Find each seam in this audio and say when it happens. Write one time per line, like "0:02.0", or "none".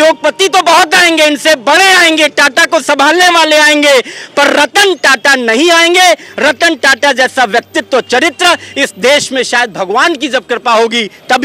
none